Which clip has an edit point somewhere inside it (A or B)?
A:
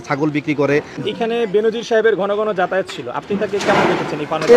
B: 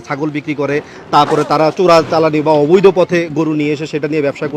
A